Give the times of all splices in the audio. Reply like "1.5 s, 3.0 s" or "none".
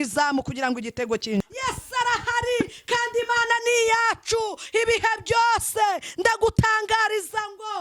1.4 s